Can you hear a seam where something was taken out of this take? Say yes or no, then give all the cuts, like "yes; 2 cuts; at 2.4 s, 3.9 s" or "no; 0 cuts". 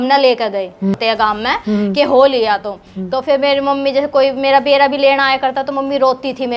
yes; 1 cut; at 1.0 s